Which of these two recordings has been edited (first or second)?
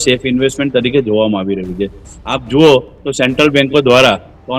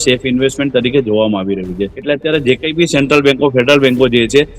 second